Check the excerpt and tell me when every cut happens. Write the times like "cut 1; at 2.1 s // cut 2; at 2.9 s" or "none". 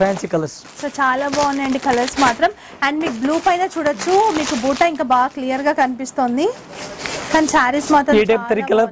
none